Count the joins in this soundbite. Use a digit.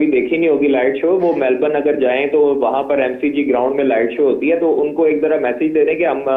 0